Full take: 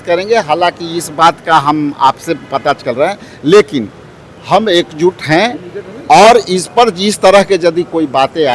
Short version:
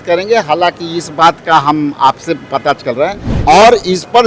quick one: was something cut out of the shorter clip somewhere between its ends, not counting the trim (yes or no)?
yes